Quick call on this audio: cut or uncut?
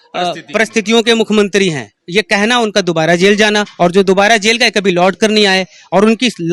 uncut